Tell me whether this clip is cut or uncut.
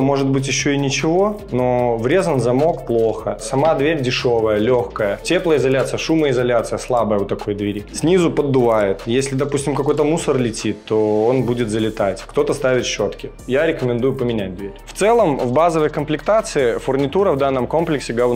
uncut